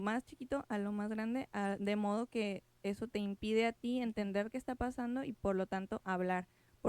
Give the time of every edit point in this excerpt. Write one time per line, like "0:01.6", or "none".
none